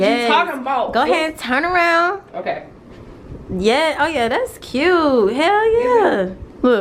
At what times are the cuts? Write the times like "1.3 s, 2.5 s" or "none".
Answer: none